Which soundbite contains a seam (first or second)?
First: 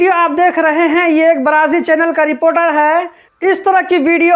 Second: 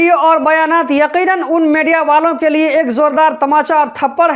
first